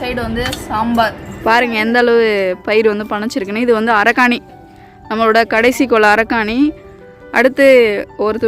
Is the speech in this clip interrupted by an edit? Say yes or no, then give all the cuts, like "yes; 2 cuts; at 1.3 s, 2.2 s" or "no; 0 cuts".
yes; 1 cut; at 1.3 s